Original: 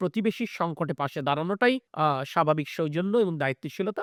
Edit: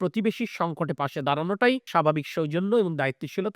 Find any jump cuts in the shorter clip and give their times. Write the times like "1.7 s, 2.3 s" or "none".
1.9 s

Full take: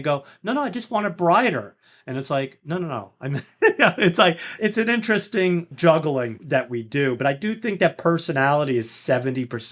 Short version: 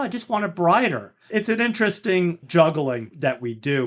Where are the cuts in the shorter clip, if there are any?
1.2 s

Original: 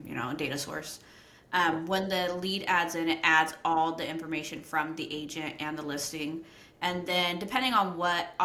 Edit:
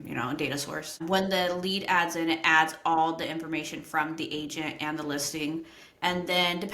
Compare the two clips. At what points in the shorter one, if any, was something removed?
1.0 s

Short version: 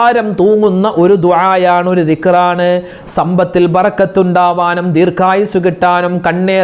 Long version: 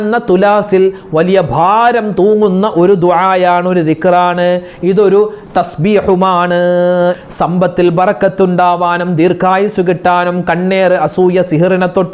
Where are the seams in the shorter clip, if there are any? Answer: 3.0 s

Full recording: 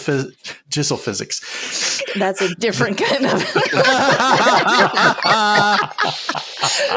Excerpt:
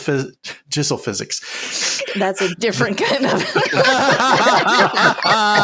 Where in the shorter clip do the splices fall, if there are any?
none

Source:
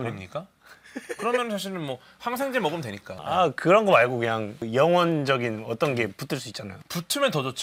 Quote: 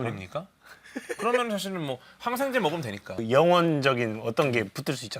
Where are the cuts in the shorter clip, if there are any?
3.1 s

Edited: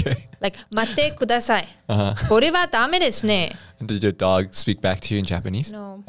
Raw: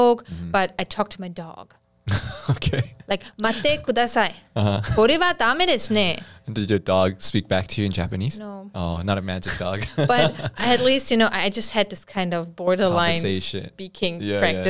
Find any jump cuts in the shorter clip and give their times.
none

